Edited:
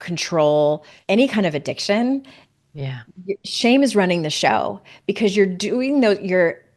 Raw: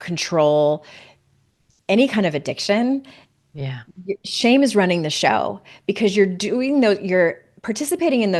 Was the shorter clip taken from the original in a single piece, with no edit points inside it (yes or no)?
no